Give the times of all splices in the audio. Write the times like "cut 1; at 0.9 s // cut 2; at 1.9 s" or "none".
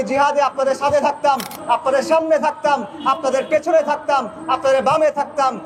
none